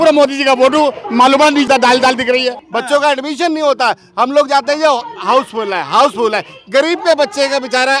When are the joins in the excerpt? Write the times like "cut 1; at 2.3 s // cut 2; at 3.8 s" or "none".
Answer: cut 1; at 2.6 s